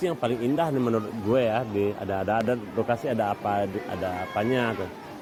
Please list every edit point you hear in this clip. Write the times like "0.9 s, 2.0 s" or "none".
none